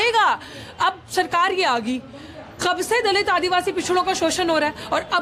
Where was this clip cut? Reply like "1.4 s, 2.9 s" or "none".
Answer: none